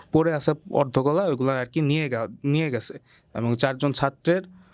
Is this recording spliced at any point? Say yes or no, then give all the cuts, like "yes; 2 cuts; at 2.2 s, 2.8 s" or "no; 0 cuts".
no; 0 cuts